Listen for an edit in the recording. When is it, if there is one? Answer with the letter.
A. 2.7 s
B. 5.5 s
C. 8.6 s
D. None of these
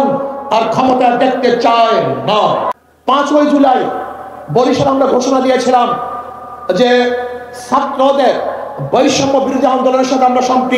A